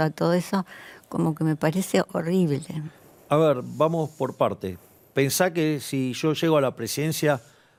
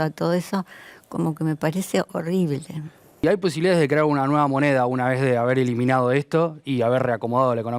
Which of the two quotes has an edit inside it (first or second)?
second